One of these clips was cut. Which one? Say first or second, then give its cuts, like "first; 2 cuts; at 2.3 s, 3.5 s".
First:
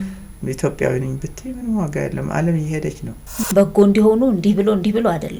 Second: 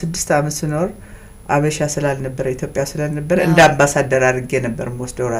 first; 1 cut; at 3.4 s